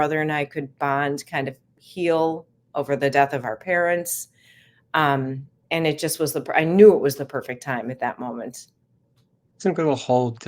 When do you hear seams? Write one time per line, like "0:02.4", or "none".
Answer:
none